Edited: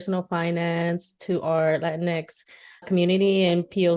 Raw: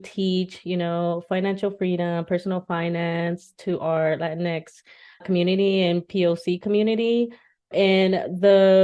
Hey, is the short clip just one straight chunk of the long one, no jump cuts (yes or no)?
yes